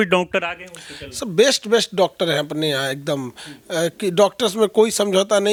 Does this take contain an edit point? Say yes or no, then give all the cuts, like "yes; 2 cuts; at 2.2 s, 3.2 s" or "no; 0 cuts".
no; 0 cuts